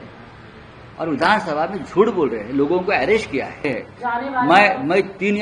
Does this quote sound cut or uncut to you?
cut